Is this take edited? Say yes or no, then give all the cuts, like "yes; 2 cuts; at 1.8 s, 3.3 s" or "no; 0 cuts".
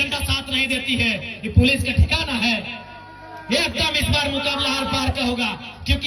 no; 0 cuts